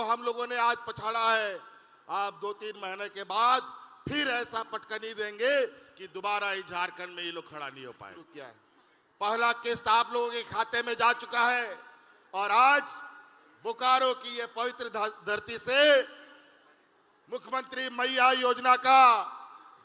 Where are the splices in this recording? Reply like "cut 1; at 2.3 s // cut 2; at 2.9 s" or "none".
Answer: cut 1; at 8.2 s